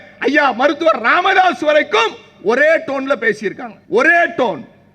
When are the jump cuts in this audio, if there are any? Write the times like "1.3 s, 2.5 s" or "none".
3.7 s